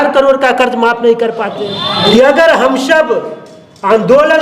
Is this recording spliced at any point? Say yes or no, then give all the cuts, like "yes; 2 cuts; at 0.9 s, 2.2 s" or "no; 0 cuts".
yes; 1 cut; at 1.6 s